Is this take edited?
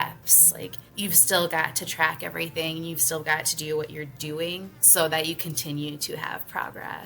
yes; 2 cuts; at 1.0 s, 4.7 s

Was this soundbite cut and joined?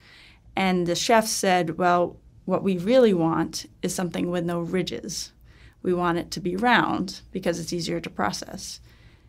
no; 0 cuts

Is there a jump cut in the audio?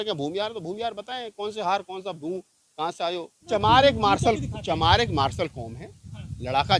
yes; 1 cut; at 3.5 s

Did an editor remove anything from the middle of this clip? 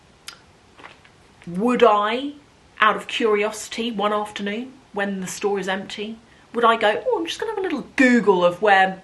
no; 0 cuts

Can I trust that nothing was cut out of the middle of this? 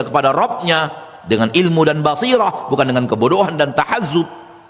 yes; 0 cuts

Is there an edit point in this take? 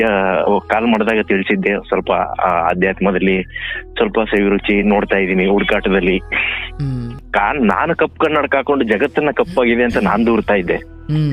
yes; 1 cut; at 7.2 s

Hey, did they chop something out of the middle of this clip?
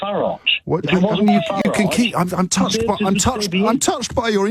no; 0 cuts

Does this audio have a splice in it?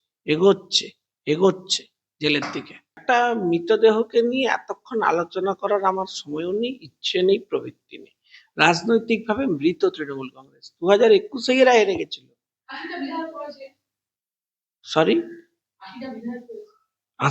yes; 1 cut; at 3.0 s

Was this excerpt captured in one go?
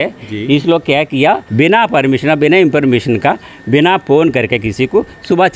no; 1 cut; at 1.5 s

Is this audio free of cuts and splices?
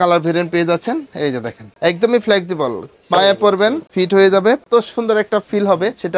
no; 3 cuts; at 1.6 s, 3.8 s, 4.6 s

